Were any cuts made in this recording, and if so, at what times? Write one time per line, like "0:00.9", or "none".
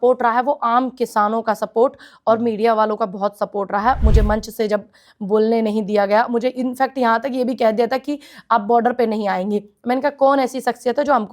0:04.0